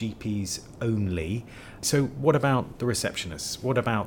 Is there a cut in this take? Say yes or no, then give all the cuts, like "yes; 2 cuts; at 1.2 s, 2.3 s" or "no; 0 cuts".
yes; 1 cut; at 1.8 s